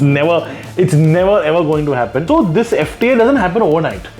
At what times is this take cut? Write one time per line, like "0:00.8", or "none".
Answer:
0:02.2

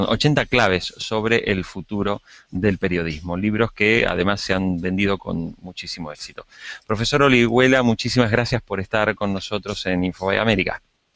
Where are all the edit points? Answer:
0:07.5

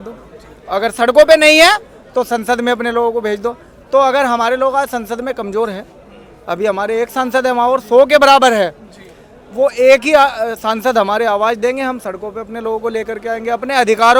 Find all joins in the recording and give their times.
none

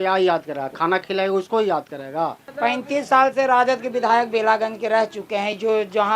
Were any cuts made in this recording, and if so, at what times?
0:02.4

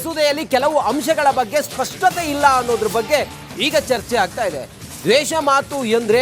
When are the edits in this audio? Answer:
0:04.0

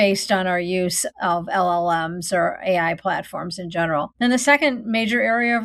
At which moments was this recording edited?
0:01.0
0:04.1

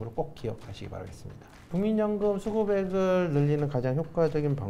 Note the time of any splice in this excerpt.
0:01.7

